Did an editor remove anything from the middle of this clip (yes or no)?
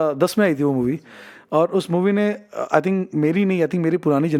no